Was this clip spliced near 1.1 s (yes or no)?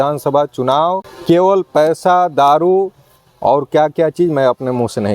yes